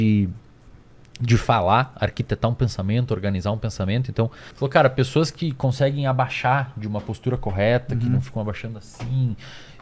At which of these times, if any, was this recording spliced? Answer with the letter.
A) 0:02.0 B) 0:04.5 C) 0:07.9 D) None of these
B